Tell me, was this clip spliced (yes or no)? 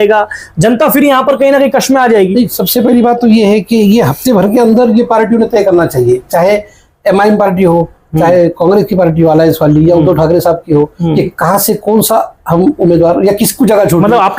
no